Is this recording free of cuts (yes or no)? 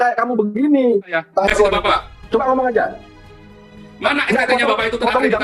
no